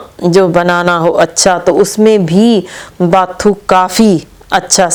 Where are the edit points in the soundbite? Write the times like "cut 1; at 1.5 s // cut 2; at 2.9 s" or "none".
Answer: none

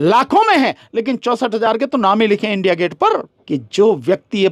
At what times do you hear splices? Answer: cut 1; at 3.3 s

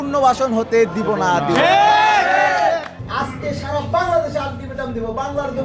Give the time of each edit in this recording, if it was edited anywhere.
cut 1; at 3.0 s

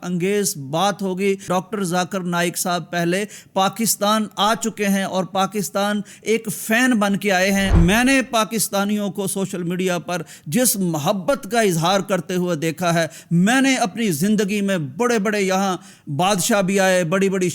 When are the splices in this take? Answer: cut 1; at 1.4 s // cut 2; at 7.8 s

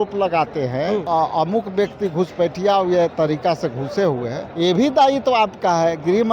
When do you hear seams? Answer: cut 1; at 1.0 s // cut 2; at 3.1 s // cut 3; at 4.4 s

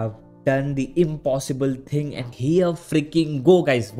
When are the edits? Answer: cut 1; at 2.3 s

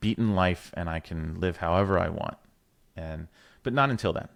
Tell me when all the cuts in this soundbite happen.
none

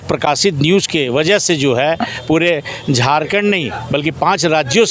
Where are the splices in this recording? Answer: none

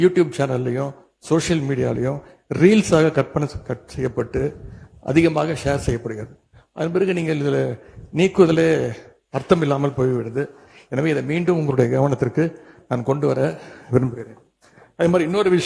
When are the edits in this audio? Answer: none

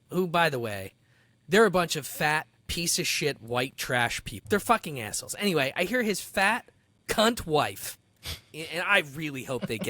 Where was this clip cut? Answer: cut 1; at 4.4 s

